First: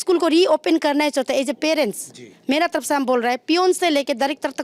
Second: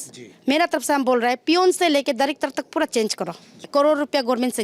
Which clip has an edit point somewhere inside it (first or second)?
second